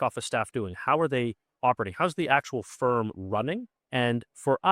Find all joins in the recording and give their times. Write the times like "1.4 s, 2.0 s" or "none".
3.7 s